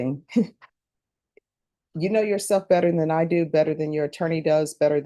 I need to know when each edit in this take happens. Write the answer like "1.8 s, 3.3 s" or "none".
none